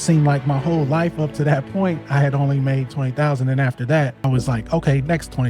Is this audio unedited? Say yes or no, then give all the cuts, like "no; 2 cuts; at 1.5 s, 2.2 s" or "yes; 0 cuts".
no; 1 cut; at 4.2 s